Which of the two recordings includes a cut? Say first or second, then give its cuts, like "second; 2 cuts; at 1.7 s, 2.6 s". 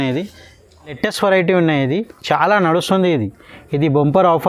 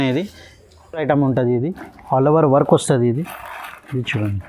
first; 1 cut; at 1.0 s